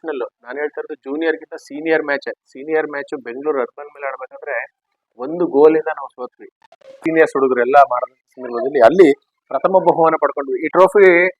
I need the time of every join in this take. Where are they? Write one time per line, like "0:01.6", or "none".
0:07.0